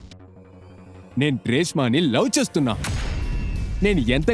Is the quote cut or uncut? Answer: cut